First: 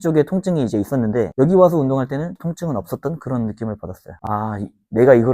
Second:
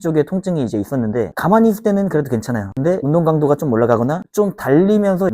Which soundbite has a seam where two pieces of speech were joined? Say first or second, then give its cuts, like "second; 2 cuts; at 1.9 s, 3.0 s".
first; 2 cuts; at 1.3 s, 4.2 s